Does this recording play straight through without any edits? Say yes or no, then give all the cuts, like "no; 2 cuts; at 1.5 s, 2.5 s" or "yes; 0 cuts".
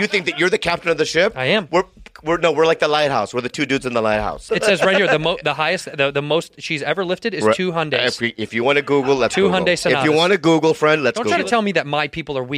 no; 2 cuts; at 4.4 s, 11.3 s